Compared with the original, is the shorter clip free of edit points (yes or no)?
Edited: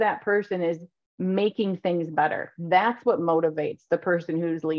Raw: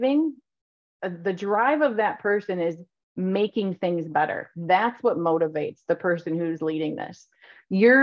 yes